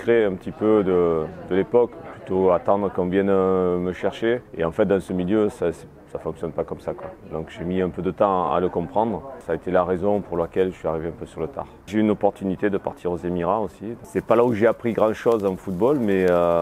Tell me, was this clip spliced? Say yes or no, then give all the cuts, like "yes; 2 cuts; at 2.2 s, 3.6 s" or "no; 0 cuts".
yes; 4 cuts; at 2.0 s, 9.4 s, 11.7 s, 14.0 s